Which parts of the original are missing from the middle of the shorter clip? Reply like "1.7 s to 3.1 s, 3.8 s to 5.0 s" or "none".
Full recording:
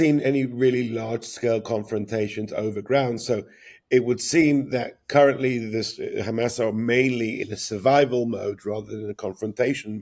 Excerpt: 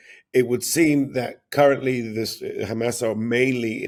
none

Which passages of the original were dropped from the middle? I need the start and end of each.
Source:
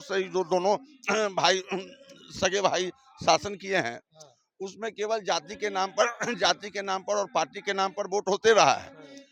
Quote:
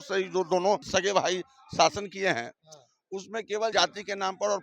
0.8 s to 2.3 s, 5.2 s to 6.4 s

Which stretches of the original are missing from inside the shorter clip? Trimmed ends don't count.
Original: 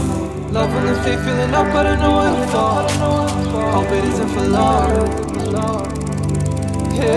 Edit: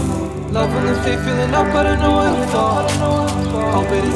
none

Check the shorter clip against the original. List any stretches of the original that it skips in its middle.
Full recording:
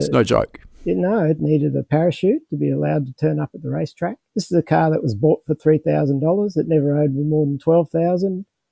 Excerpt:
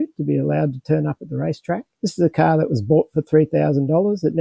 none

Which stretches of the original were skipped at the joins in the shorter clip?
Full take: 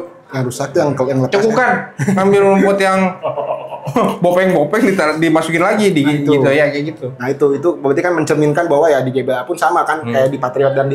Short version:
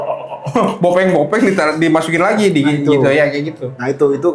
none

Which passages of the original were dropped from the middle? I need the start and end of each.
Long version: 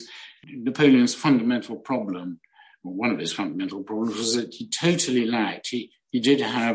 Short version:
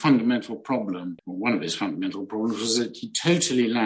2.4 s to 2.8 s

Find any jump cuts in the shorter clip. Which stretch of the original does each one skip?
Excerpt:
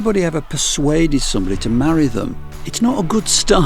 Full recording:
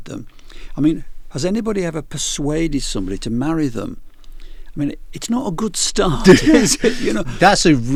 4.2 s to 5.1 s

